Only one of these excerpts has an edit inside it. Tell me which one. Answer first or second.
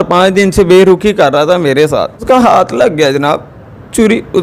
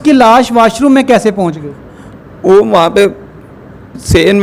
first